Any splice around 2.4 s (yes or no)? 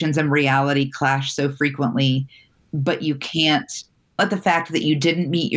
no